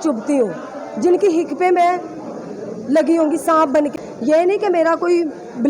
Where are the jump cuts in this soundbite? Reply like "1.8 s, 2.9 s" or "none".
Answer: 3.8 s